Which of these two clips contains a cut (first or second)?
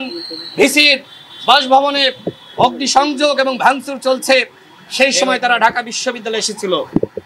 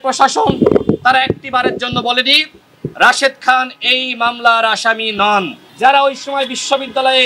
second